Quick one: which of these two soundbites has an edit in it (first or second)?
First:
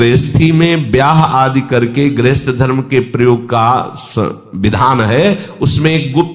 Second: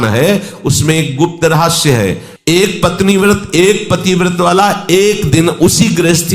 second